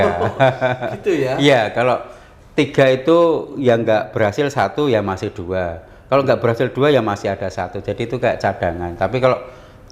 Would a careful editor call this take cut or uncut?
uncut